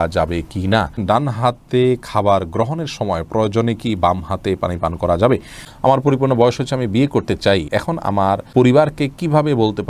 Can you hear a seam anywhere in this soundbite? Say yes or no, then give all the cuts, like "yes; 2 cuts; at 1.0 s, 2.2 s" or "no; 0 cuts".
yes; 3 cuts; at 1.0 s, 5.6 s, 8.1 s